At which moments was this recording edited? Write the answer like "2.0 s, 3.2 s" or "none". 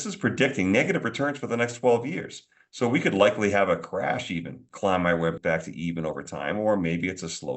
5.3 s